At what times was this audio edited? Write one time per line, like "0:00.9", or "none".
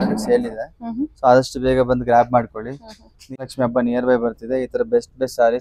0:03.4